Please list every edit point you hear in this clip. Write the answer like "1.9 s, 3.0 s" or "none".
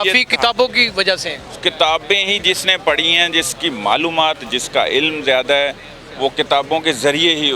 none